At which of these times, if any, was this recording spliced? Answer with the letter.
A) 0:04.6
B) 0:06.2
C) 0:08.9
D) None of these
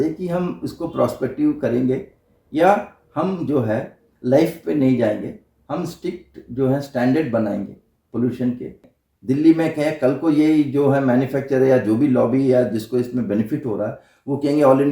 C